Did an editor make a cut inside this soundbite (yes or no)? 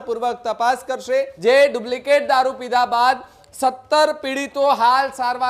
yes